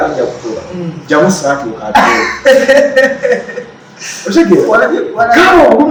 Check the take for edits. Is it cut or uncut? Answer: uncut